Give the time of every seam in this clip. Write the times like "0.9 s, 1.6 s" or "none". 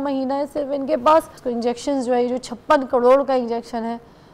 1.4 s